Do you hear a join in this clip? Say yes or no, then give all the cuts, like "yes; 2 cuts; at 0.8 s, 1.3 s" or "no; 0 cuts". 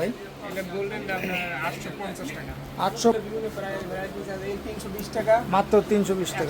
yes; 1 cut; at 3.1 s